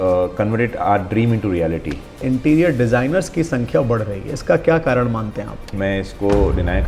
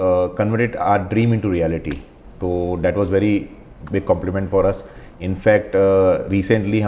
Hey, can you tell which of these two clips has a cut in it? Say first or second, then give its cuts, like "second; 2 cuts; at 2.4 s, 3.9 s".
first; 2 cuts; at 2.2 s, 5.7 s